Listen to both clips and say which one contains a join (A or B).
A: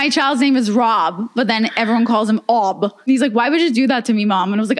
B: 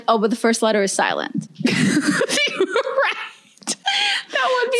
A